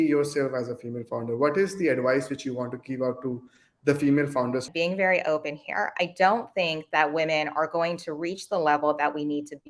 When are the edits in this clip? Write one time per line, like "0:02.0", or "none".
0:04.7